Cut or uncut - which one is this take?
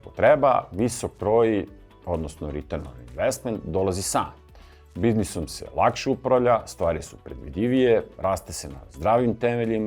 uncut